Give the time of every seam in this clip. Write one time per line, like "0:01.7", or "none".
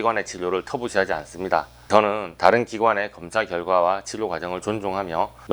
0:01.9